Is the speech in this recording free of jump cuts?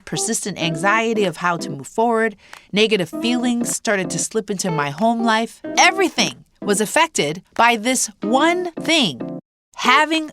no; 3 cuts; at 5.6 s, 7.4 s, 9.1 s

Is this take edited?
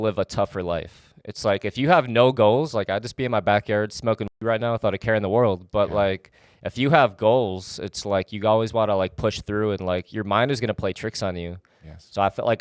no; 0 cuts

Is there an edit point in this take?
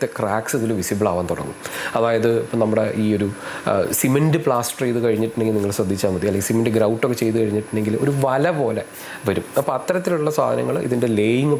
no; 0 cuts

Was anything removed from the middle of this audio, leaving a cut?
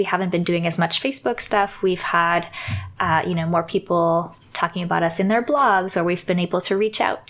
no; 0 cuts

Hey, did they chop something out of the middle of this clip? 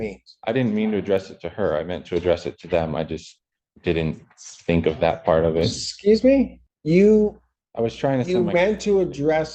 yes; 1 cut; at 6.7 s

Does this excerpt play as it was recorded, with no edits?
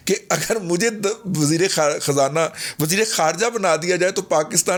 yes; 0 cuts

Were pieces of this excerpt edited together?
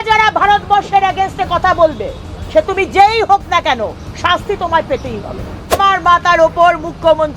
yes; 1 cut; at 5.8 s

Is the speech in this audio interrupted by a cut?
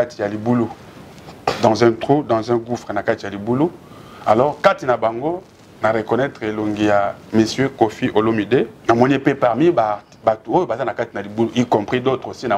yes; 1 cut; at 8.8 s

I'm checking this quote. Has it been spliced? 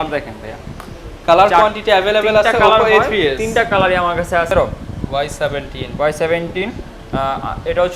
yes; 1 cut; at 4.5 s

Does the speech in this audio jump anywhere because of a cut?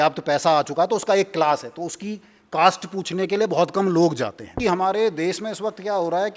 yes; 1 cut; at 4.5 s

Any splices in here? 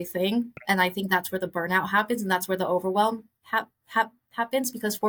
no; 0 cuts

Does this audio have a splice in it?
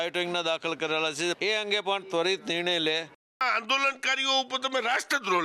yes; 2 cuts; at 1.4 s, 3.4 s

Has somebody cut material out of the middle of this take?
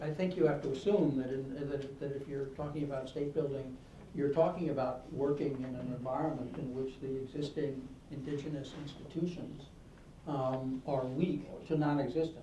yes; 1 cut; at 11.5 s

